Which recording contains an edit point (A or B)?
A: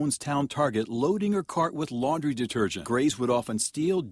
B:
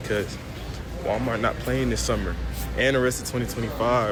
A